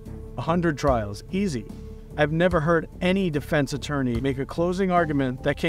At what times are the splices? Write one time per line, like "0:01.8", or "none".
none